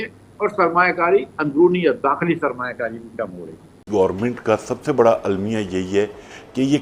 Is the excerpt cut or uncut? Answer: cut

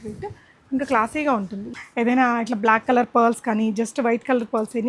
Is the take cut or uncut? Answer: cut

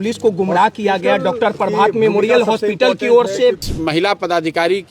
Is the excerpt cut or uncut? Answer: cut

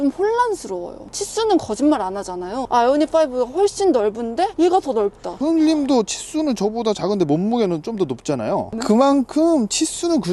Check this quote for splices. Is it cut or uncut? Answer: cut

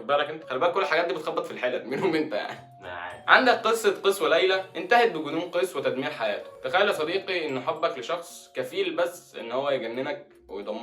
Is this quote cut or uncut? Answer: cut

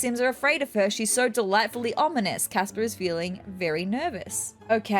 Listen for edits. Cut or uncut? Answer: uncut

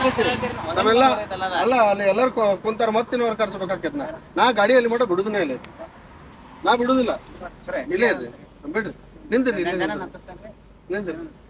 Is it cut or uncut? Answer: uncut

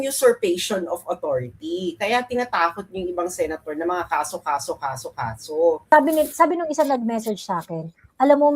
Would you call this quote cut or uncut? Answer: cut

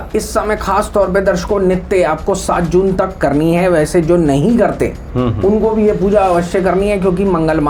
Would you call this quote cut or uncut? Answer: uncut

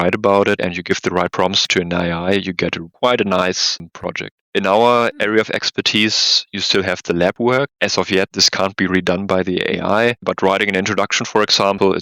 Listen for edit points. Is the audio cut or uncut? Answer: cut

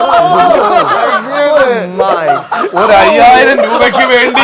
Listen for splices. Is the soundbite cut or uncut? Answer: uncut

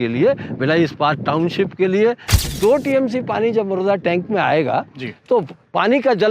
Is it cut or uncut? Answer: cut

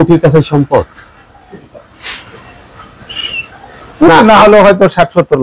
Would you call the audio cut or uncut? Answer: uncut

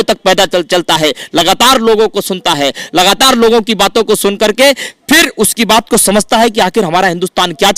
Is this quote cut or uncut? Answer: uncut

